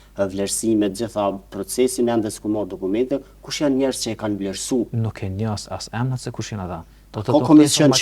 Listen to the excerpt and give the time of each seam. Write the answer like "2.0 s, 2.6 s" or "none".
none